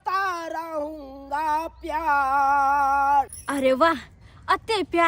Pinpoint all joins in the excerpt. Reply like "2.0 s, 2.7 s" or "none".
3.4 s